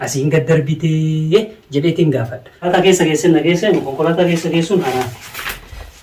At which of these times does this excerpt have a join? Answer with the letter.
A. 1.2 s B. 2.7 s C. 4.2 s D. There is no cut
B